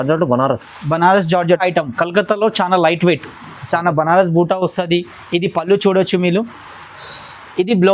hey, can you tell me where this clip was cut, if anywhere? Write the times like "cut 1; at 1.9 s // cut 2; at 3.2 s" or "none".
cut 1; at 1.6 s